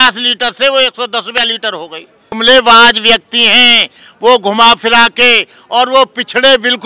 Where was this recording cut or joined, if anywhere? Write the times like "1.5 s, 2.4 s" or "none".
2.2 s

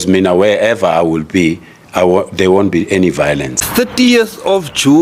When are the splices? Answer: 3.6 s

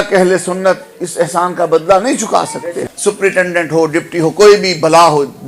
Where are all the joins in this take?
2.9 s

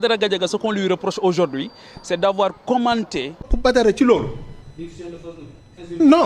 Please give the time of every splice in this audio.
3.5 s

